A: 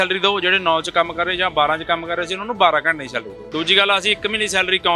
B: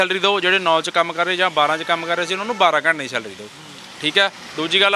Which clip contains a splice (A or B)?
A